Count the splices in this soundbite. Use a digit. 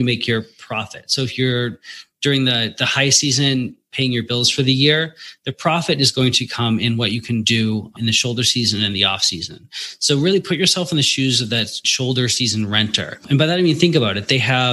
4